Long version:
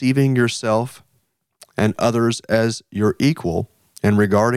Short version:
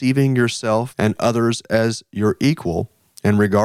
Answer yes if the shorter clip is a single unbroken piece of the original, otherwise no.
no